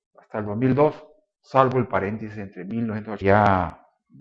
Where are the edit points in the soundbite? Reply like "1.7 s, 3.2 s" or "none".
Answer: none